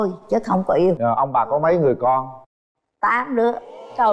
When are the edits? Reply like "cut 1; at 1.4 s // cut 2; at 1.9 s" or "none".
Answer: cut 1; at 1.0 s